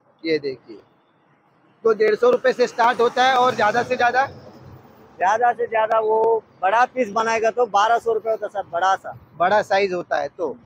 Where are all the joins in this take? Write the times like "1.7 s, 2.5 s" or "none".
none